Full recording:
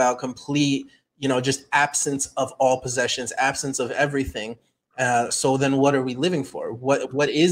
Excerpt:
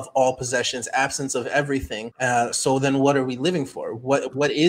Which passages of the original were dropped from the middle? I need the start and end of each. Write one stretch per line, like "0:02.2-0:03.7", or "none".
0:04.5-0:04.8